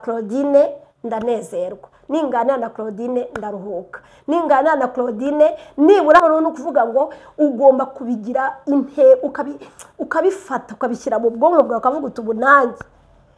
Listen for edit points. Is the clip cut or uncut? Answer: cut